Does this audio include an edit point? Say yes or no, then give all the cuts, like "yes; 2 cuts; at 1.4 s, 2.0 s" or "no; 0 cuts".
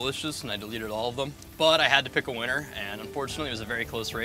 no; 0 cuts